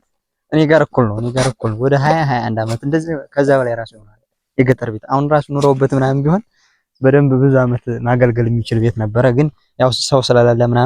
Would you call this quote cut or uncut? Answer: uncut